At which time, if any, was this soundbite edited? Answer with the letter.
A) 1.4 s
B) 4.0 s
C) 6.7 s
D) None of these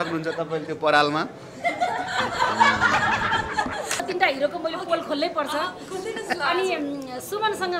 B